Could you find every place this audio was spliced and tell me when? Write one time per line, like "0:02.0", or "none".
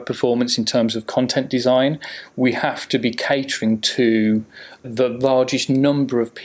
none